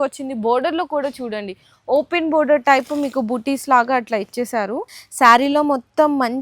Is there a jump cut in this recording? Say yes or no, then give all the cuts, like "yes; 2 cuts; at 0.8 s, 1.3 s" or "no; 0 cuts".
yes; 1 cut; at 5.0 s